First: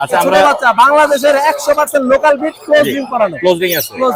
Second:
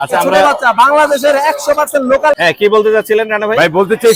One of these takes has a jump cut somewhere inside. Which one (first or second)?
second